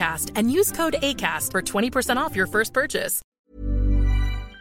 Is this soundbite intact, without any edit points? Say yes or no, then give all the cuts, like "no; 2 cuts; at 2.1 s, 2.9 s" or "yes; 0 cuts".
no; 1 cut; at 3.3 s